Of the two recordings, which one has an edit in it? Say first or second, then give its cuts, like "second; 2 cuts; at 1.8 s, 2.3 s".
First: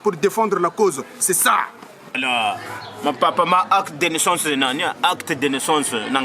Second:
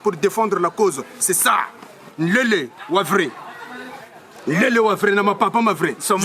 first; 1 cut; at 2.2 s